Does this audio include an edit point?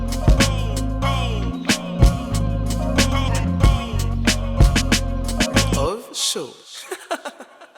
no; 0 cuts

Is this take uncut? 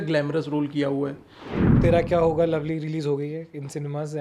no; 1 cut; at 1.6 s

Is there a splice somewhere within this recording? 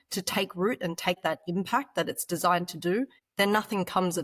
yes; 2 cuts; at 1.2 s, 3.2 s

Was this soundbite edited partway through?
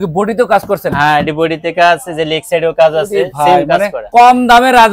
no; 0 cuts

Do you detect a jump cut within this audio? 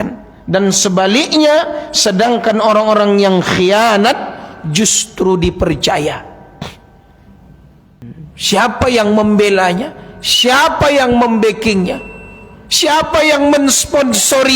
yes; 1 cut; at 8.0 s

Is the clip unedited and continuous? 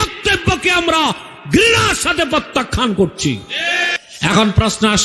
no; 1 cut; at 3.9 s

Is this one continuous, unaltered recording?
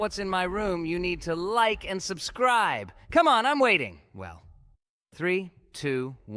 yes; 0 cuts

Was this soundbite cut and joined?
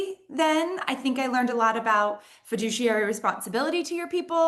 no; 0 cuts

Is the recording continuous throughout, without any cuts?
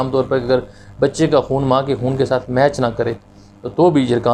yes; 0 cuts

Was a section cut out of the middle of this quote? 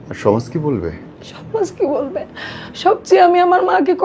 no; 0 cuts

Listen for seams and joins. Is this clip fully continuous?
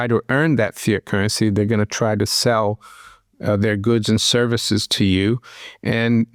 yes; 0 cuts

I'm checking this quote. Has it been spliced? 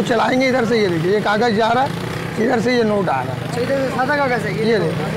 no; 0 cuts

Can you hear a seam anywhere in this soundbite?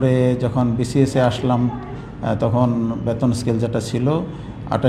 no; 0 cuts

